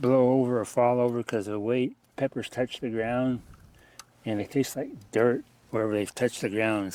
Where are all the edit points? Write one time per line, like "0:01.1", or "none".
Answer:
0:02.0
0:04.4